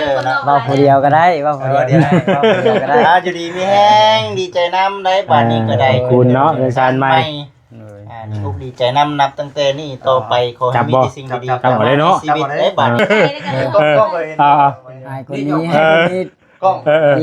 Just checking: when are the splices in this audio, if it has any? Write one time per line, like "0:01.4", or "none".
0:13.0